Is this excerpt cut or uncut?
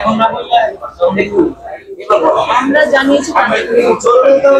uncut